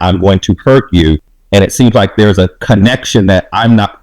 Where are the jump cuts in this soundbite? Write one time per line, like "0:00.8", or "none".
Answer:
0:01.3